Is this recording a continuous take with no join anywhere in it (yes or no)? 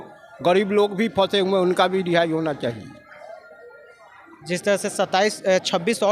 yes